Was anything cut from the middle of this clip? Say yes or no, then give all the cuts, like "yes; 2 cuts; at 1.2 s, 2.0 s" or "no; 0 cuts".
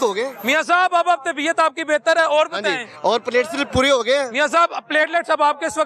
no; 0 cuts